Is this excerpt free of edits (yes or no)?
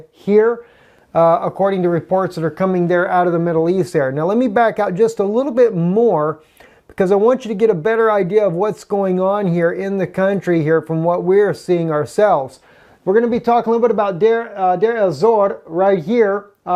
yes